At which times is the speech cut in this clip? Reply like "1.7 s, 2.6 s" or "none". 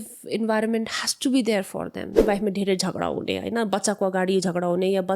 2.2 s